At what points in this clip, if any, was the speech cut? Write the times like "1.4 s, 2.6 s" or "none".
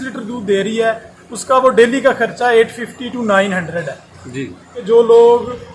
4.8 s